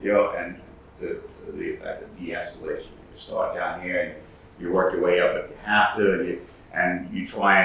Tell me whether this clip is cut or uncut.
uncut